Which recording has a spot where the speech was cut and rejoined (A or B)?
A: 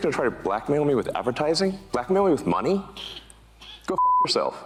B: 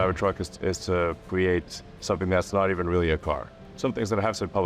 B